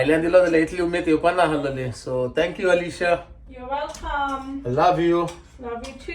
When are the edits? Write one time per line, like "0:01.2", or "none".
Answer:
none

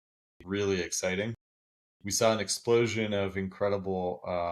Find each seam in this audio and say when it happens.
0:01.6

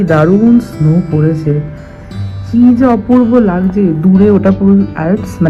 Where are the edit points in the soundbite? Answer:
none

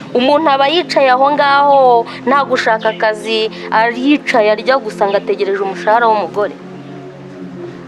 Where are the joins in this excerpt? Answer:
0:06.5

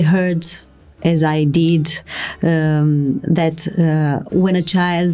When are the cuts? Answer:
none

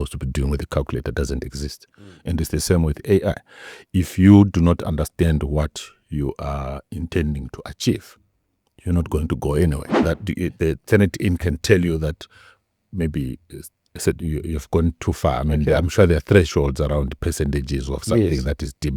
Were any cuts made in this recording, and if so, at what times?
0:09.9

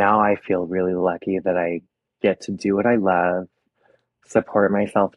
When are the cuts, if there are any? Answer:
none

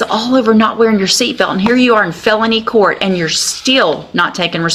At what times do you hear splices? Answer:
none

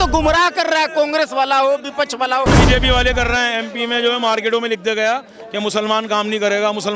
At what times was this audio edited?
0:02.6

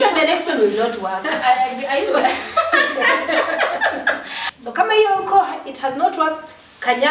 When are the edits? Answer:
0:04.4

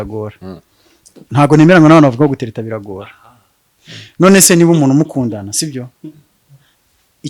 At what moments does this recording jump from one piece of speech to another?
none

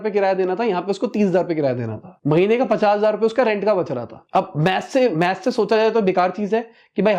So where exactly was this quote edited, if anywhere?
none

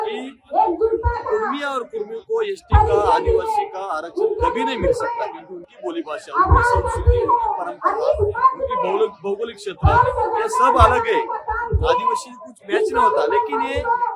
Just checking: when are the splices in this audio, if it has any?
none

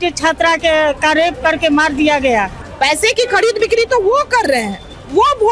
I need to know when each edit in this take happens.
0:02.6

